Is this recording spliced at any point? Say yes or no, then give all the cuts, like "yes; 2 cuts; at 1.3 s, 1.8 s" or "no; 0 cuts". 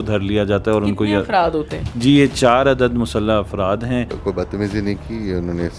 yes; 1 cut; at 4.1 s